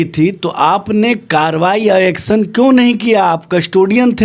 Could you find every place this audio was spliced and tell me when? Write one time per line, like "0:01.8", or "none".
none